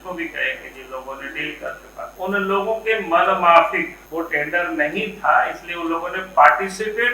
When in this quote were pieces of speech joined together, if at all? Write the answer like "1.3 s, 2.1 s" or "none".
2.1 s, 4.0 s

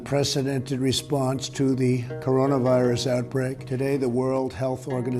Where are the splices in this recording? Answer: 3.6 s

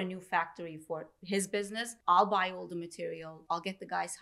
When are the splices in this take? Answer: 1.9 s, 3.3 s

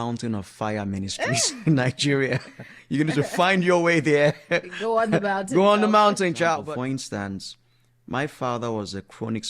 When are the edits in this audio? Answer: 6.6 s

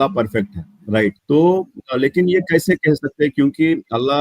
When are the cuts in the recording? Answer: 1.2 s

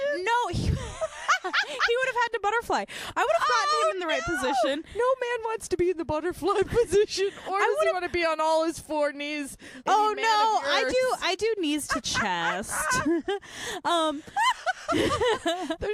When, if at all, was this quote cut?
9.7 s

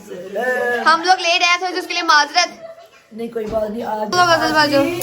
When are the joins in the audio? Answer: 4.1 s

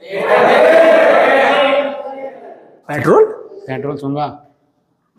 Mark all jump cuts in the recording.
2.8 s

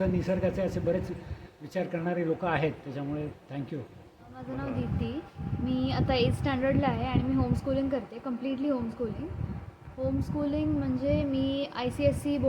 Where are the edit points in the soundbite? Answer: 4.4 s

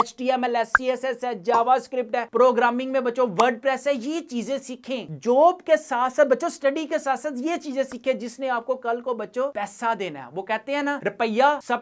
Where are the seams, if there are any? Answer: none

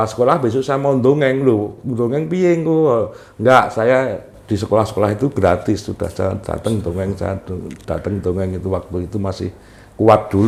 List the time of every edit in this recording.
none

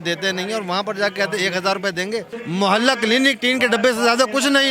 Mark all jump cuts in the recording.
2.4 s

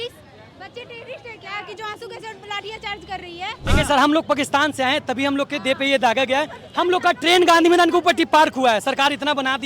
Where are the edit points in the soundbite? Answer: 3.6 s

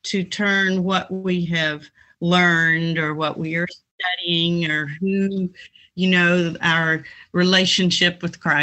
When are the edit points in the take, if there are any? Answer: none

